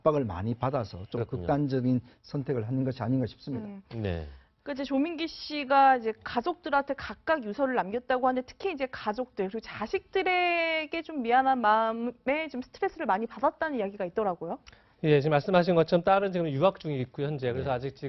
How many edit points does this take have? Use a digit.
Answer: 0